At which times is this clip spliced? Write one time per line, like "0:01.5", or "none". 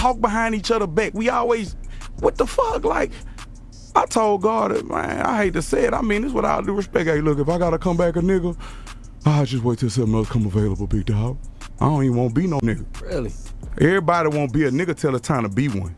0:11.6